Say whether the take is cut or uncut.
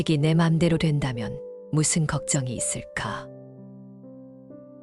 cut